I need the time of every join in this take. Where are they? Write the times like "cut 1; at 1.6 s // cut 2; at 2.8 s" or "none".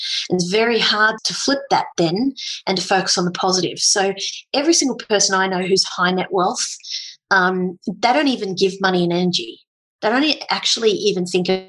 cut 1; at 1.3 s